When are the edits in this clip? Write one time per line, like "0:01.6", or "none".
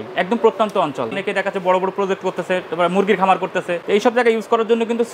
0:01.2
0:03.8

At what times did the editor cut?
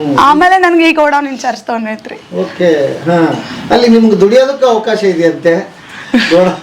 none

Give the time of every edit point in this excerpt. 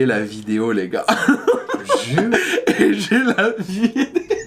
none

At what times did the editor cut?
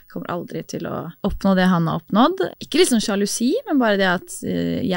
0:01.1
0:02.6

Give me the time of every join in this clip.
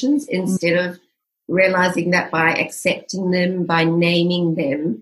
none

